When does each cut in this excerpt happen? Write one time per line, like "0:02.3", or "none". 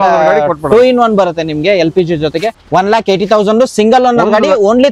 0:02.6